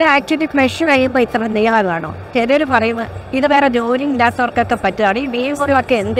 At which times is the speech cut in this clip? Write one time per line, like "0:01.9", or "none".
0:02.3

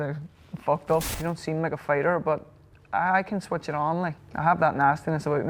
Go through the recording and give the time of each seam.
0:01.1
0:04.2

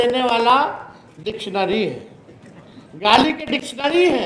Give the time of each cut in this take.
none

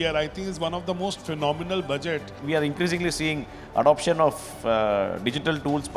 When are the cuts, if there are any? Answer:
0:02.4

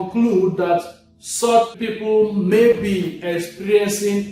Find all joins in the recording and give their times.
0:01.7

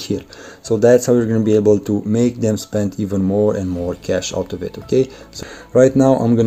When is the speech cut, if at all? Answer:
0:05.3

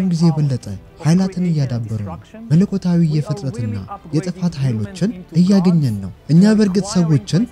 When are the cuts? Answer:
none

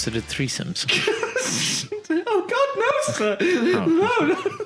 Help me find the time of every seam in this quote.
none

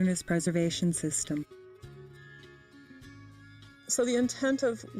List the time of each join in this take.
0:03.5

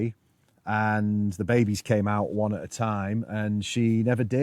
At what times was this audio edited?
none

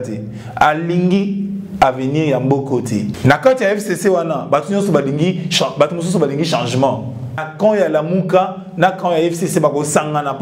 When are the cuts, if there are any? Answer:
0:03.1
0:07.5

